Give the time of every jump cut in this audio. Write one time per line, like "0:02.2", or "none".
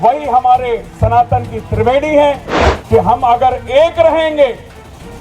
0:02.6